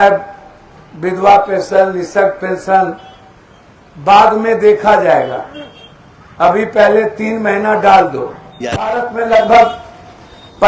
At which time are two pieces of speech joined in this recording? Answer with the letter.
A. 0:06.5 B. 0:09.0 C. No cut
B